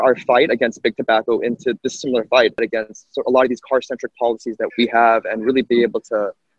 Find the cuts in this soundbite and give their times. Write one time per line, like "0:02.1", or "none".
0:02.6
0:04.7